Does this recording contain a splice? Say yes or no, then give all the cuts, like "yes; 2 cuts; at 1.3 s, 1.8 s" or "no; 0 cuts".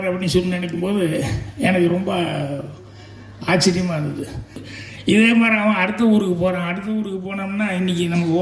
yes; 1 cut; at 4.7 s